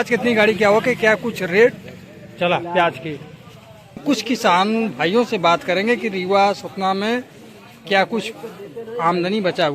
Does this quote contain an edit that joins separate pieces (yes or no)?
yes